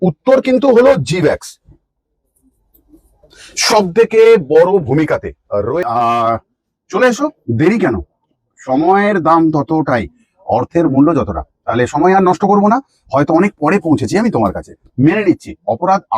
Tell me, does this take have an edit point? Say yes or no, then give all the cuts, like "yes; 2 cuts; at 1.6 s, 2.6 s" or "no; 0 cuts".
yes; 1 cut; at 5.8 s